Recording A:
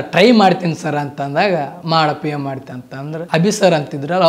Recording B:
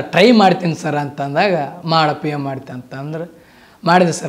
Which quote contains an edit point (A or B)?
A